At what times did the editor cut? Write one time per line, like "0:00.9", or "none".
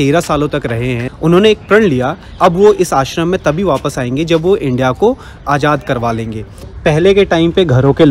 0:01.1
0:02.3
0:05.4
0:06.6

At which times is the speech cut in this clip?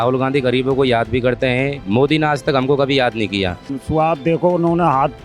0:03.8

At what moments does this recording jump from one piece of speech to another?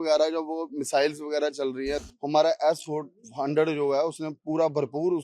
0:02.0

